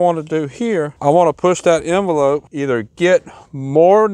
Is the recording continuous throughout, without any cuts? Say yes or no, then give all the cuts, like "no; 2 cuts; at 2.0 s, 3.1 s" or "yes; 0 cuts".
no; 2 cuts; at 0.9 s, 2.5 s